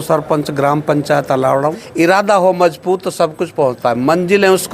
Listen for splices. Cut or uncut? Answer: cut